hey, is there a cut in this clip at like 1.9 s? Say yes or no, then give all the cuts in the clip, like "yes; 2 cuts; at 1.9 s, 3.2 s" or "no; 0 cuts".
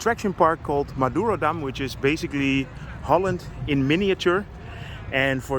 no; 0 cuts